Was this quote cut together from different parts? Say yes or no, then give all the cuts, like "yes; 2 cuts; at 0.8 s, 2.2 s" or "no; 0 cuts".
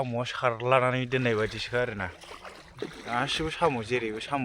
no; 0 cuts